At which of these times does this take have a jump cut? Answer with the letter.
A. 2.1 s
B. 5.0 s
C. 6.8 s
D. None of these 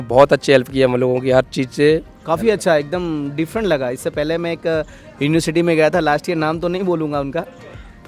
A